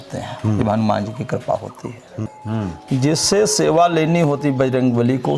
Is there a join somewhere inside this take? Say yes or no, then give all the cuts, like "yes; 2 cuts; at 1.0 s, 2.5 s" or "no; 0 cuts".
yes; 1 cut; at 2.2 s